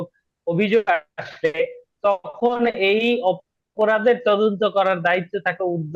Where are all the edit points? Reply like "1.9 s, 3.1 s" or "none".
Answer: none

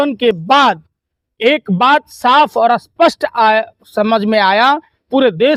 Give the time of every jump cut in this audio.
none

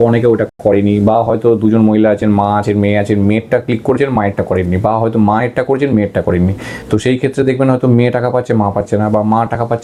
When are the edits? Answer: none

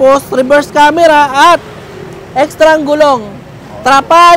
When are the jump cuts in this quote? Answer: none

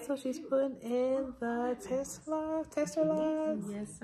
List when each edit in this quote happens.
none

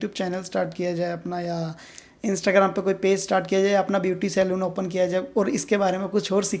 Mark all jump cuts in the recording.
none

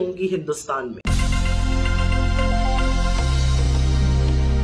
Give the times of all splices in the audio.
1.0 s

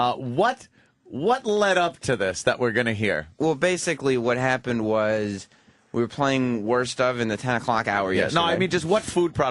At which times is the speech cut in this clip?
none

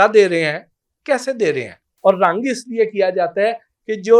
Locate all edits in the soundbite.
1.8 s

